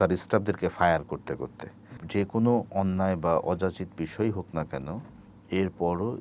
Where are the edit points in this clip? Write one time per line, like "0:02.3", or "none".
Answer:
0:02.0